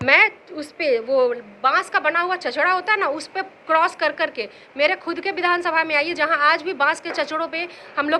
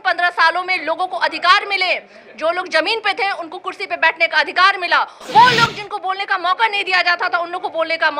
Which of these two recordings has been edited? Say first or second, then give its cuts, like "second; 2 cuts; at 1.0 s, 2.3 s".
second; 1 cut; at 5.2 s